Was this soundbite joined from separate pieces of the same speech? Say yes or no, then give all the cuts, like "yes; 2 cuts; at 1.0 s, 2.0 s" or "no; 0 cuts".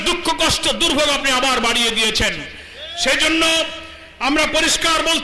no; 0 cuts